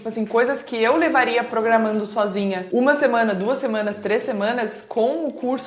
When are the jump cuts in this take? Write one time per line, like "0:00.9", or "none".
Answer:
0:02.6